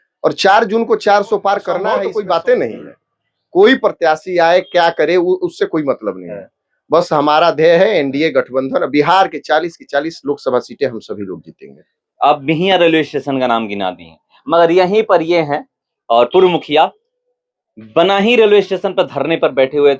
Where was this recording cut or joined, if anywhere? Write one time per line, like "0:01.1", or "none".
none